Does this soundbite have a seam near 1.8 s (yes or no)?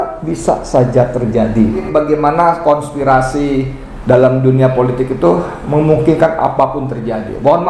yes